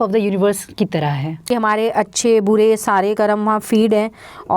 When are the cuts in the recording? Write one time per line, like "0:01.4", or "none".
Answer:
0:01.4

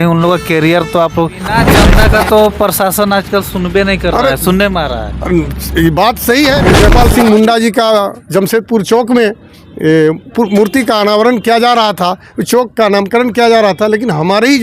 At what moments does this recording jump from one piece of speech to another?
0:01.6
0:06.6

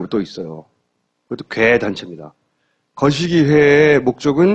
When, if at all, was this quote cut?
0:01.3

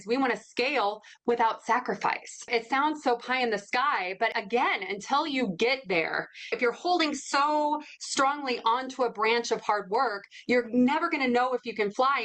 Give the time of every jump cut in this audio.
0:02.5
0:04.3
0:06.5

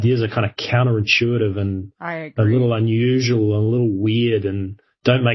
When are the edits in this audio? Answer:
none

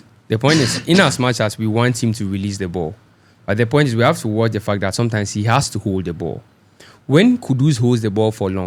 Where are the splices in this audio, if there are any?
none

